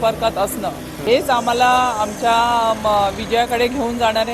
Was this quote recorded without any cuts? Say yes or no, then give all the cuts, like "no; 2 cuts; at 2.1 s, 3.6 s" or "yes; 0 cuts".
no; 1 cut; at 0.9 s